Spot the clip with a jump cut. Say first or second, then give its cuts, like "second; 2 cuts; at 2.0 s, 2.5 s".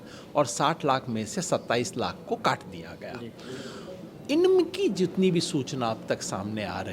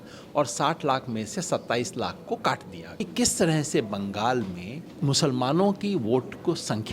second; 2 cuts; at 3.1 s, 4.8 s